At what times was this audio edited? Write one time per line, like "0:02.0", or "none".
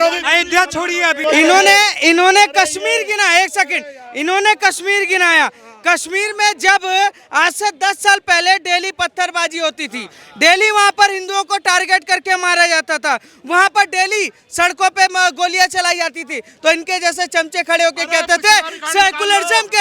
none